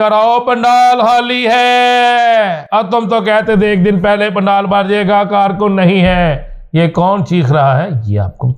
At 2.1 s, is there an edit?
no; 0 cuts

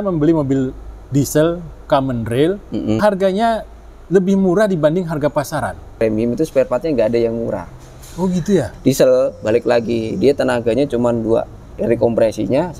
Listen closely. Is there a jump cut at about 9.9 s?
no; 3 cuts; at 3.0 s, 6.0 s, 8.7 s

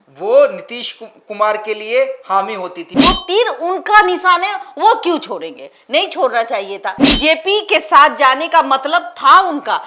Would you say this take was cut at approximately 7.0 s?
yes; 2 cuts; at 2.9 s, 7.0 s

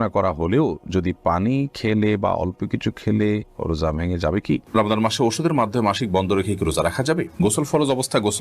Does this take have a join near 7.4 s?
yes; 2 cuts; at 4.7 s, 7.4 s

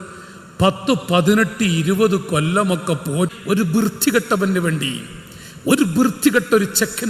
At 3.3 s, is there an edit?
yes; 1 cut; at 3.3 s

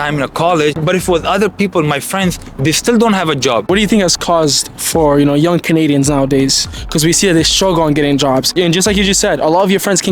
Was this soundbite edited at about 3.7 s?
yes; 3 cuts; at 0.8 s, 3.7 s, 8.5 s

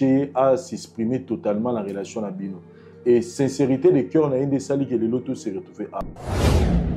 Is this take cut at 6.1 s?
yes; 1 cut; at 6.1 s

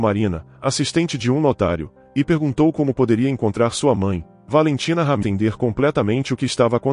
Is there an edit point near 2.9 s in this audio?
no; 1 cut; at 5.2 s

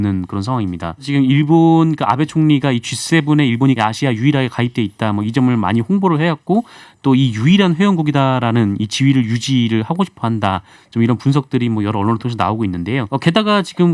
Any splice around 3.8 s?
yes; 3 cuts; at 1.0 s, 3.8 s, 13.1 s

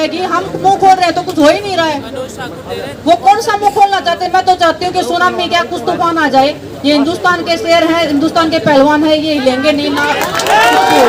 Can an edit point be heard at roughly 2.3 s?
no; 0 cuts

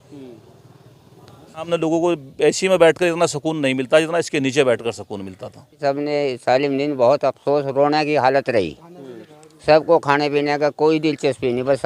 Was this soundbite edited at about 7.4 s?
no; 2 cuts; at 1.7 s, 5.8 s

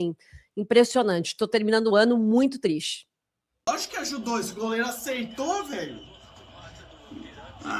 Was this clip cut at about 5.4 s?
no; 1 cut; at 3.6 s

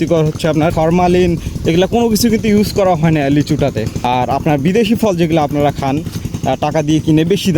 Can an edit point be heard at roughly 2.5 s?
no; 2 cuts; at 0.7 s, 4.0 s

